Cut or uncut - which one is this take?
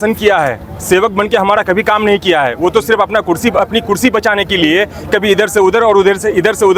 uncut